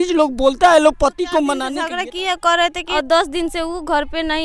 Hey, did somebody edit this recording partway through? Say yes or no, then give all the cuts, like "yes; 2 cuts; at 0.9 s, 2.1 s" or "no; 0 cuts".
yes; 2 cuts; at 1.7 s, 2.8 s